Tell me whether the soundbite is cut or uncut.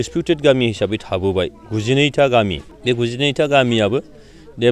cut